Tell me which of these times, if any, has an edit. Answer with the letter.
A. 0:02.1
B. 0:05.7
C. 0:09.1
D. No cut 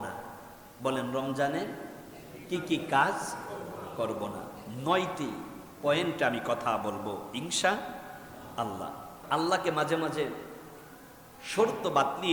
C